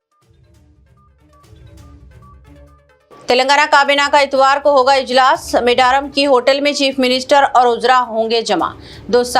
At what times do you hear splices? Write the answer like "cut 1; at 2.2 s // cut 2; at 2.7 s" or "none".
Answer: cut 1; at 1.8 s